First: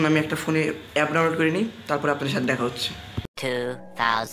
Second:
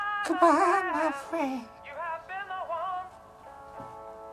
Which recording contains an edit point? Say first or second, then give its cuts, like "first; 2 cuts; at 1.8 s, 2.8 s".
first; 1 cut; at 3.2 s